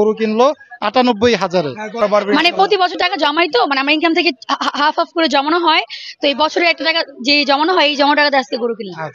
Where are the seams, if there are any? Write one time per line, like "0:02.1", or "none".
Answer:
0:02.0